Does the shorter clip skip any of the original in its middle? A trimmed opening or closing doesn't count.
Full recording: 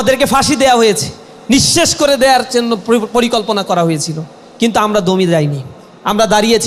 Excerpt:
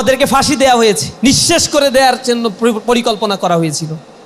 yes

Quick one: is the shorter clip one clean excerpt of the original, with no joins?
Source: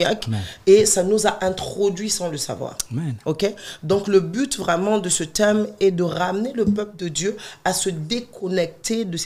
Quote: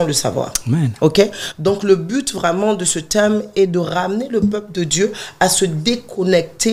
yes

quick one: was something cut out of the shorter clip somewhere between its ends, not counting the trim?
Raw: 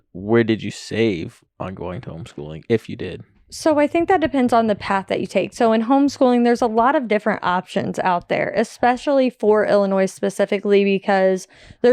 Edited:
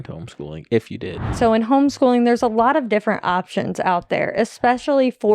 yes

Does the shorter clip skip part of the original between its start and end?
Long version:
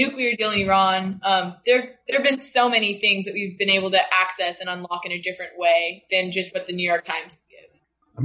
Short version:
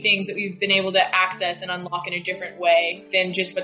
no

